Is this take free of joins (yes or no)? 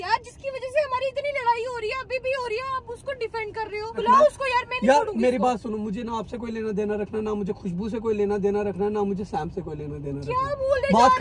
no